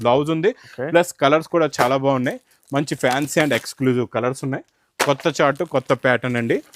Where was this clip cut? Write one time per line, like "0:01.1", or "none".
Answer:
none